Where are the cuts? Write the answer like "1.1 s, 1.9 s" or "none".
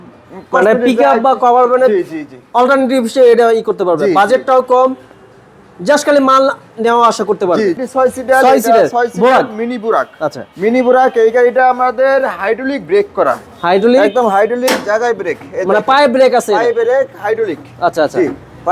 7.8 s